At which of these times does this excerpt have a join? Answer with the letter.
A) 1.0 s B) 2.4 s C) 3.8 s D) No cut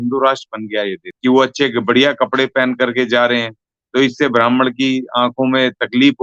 A